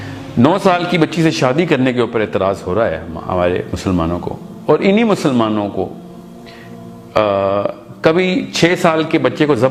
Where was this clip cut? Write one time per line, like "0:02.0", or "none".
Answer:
none